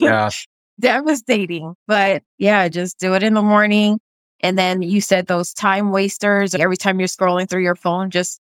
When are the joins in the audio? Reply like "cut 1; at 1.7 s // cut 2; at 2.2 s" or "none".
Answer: cut 1; at 2.3 s // cut 2; at 6.6 s